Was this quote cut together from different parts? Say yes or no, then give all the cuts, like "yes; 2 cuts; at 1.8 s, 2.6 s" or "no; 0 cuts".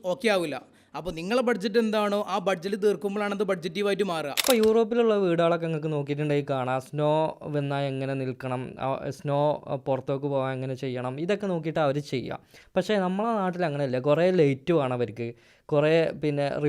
yes; 1 cut; at 4.4 s